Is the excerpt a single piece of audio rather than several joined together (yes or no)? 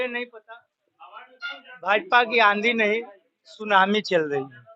yes